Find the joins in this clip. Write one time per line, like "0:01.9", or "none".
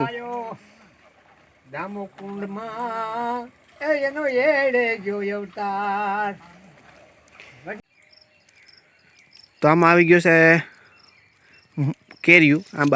0:07.8